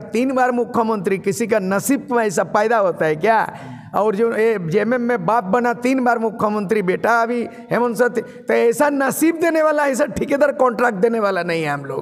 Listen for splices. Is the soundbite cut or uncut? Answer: uncut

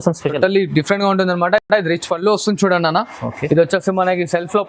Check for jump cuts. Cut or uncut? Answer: uncut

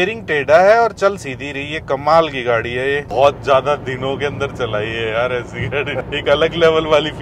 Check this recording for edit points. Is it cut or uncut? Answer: cut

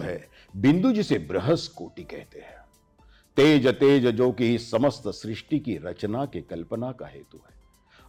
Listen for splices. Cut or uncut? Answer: uncut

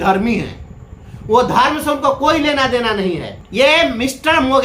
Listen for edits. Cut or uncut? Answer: cut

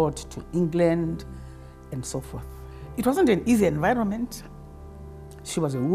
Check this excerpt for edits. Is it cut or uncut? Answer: uncut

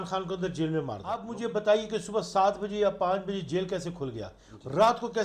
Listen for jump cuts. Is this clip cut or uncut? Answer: cut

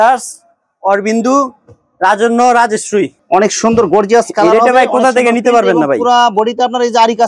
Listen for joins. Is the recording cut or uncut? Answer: cut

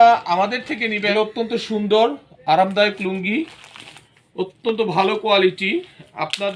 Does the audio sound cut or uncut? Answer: cut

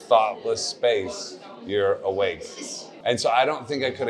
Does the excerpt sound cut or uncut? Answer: uncut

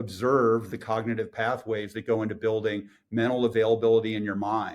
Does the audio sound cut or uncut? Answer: uncut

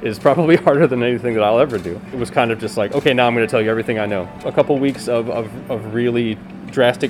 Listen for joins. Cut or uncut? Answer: cut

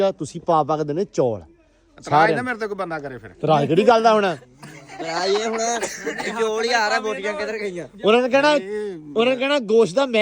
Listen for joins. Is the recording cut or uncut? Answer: uncut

